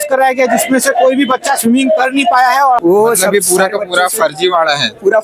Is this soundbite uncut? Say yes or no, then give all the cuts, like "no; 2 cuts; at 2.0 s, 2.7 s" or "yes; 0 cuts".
no; 1 cut; at 2.8 s